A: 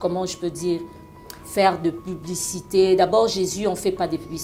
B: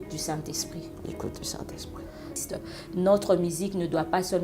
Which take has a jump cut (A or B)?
B